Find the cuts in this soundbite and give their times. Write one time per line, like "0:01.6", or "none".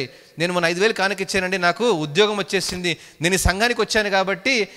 none